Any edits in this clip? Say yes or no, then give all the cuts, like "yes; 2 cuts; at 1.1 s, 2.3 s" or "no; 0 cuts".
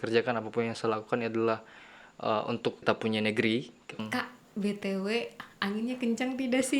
yes; 2 cuts; at 2.8 s, 4.0 s